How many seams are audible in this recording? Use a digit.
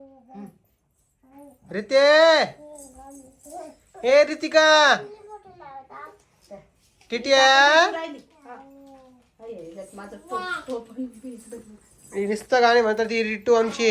0